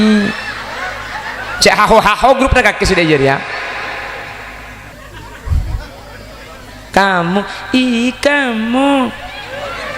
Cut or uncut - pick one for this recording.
cut